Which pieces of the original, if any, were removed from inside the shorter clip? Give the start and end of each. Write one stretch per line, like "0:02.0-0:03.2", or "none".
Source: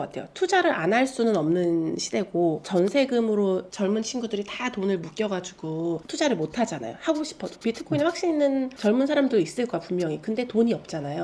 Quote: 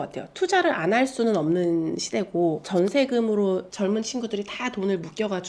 none